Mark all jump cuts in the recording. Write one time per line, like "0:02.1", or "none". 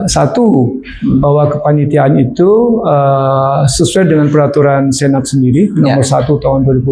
none